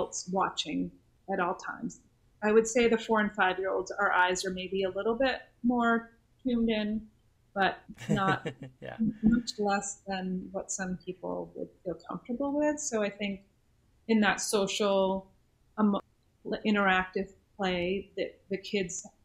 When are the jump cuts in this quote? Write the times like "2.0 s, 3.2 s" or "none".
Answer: 1.1 s, 7.9 s, 16.1 s

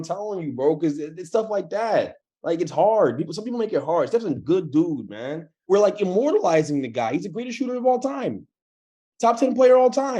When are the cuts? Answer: 5.7 s

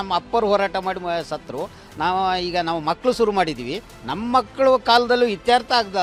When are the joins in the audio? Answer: none

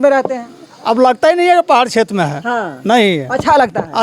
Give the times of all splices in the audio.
none

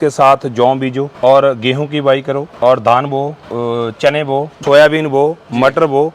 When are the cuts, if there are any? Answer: 1.1 s, 2.5 s, 3.4 s, 4.6 s

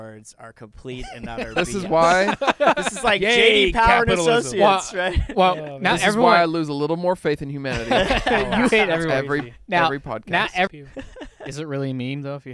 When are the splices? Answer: 10.7 s

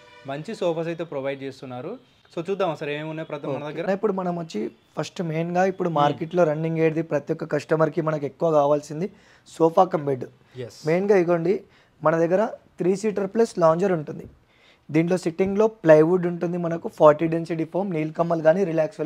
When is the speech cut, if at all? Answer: none

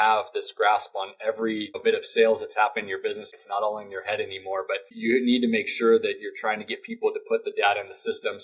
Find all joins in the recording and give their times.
1.7 s, 3.3 s, 4.9 s

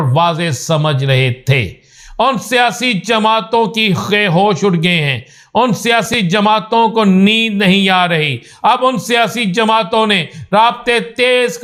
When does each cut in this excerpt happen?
none

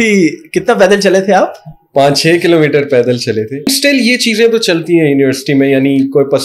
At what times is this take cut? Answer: 3.7 s

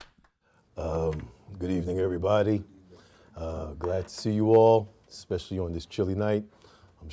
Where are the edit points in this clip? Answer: 4.9 s

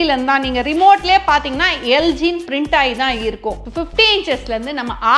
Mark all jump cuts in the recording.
3.6 s

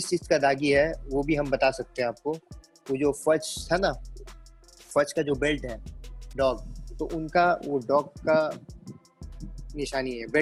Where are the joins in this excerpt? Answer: none

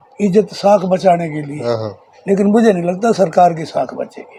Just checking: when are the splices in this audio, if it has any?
none

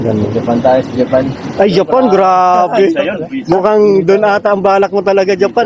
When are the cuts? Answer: none

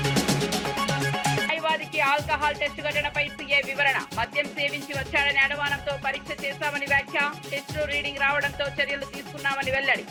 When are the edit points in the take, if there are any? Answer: none

